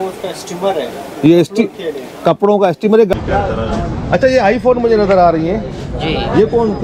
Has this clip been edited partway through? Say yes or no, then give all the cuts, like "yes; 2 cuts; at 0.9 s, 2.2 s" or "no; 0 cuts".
yes; 1 cut; at 3.1 s